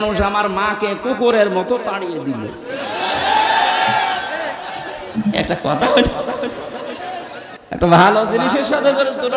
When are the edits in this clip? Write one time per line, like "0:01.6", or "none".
0:07.5